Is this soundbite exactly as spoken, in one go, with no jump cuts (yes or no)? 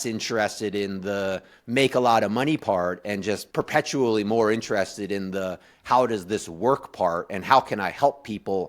no